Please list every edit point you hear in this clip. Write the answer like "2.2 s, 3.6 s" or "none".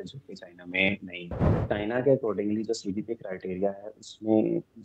1.4 s

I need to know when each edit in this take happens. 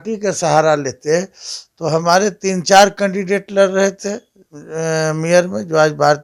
none

